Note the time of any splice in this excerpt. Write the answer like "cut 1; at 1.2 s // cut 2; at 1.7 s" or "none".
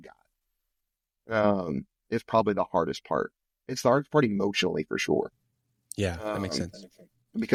none